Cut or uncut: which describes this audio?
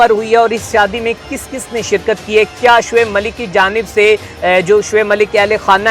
uncut